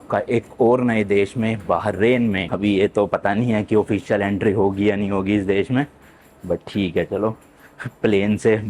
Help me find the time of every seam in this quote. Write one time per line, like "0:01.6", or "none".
none